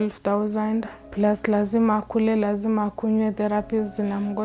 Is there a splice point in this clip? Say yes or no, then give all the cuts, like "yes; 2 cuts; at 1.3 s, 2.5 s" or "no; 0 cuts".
yes; 1 cut; at 1.0 s